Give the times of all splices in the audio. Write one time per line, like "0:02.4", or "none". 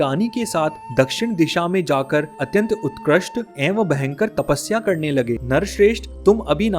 0:05.4